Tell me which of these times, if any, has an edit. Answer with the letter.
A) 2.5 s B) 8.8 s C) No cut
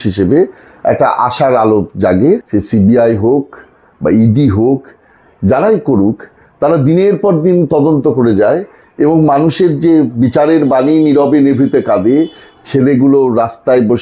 A